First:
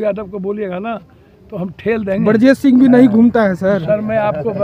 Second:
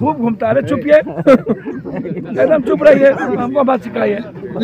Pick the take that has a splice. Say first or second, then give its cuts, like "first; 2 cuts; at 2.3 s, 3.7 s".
second; 1 cut; at 3.5 s